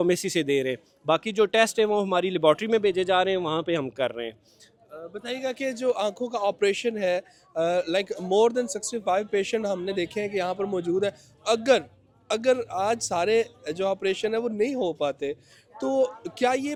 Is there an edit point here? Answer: no; 0 cuts

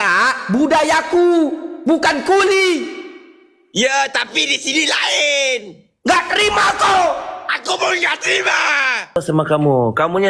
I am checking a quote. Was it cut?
yes; 1 cut; at 9.2 s

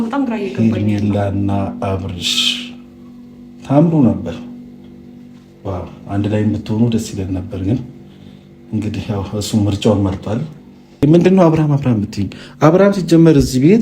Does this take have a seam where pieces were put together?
yes; 1 cut; at 11.0 s

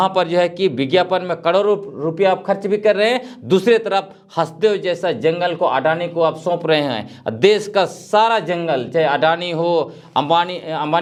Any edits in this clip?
no; 0 cuts

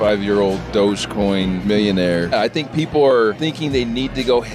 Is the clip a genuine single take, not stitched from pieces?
no; 3 cuts; at 1.6 s, 2.3 s, 3.4 s

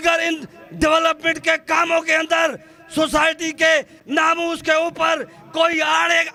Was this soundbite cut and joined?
no; 0 cuts

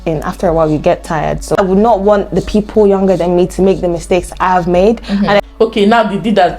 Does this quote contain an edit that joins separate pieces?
yes; 2 cuts; at 1.6 s, 5.4 s

